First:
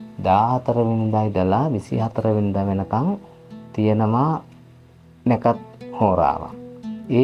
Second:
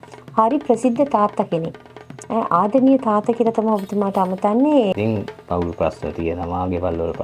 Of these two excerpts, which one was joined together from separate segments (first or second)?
second